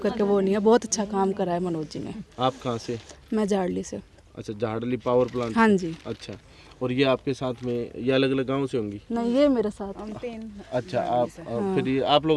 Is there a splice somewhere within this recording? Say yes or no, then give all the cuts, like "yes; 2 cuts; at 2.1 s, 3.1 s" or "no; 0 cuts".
no; 0 cuts